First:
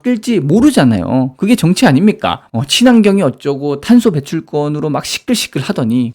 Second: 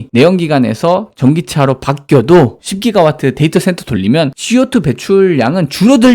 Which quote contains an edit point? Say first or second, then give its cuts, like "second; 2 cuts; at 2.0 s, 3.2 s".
second; 1 cut; at 2.6 s